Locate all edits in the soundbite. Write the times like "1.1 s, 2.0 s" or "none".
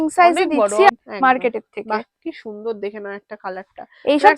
0.9 s